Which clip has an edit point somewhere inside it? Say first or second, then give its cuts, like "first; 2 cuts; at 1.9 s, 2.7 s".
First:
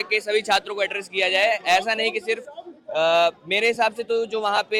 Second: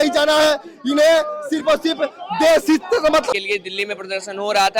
second; 1 cut; at 3.3 s